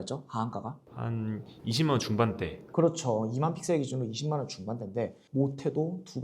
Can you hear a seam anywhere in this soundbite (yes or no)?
no